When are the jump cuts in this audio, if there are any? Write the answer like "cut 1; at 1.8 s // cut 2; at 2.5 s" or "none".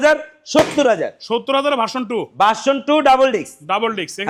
none